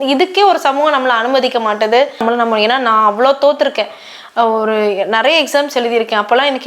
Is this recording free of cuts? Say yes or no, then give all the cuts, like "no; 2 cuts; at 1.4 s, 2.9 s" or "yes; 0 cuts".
no; 1 cut; at 2.2 s